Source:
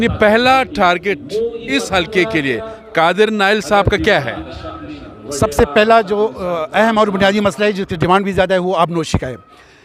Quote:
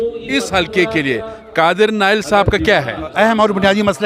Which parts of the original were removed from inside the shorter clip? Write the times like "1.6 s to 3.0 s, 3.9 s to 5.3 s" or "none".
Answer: 4.4 s to 6.6 s